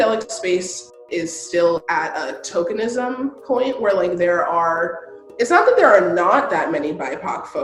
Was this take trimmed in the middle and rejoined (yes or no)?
yes